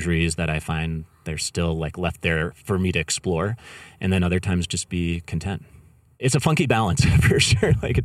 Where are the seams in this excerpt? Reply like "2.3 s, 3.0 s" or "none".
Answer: 6.2 s